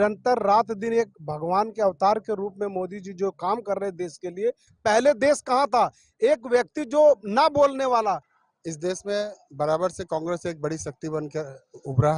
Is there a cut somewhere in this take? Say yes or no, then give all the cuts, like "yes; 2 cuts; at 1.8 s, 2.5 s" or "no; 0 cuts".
yes; 2 cuts; at 4.7 s, 8.3 s